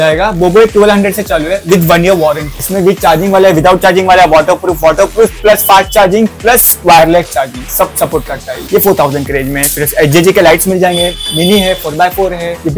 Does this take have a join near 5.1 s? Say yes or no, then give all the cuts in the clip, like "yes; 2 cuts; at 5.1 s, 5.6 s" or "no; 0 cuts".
no; 0 cuts